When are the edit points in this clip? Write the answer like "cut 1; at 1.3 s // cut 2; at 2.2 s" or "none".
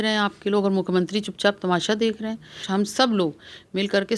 cut 1; at 2.6 s